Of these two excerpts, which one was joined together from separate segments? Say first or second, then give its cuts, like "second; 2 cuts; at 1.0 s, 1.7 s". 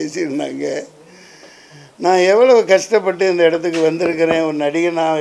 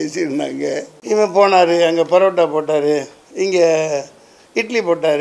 second; 1 cut; at 0.9 s